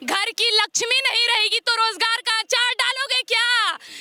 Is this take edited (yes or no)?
no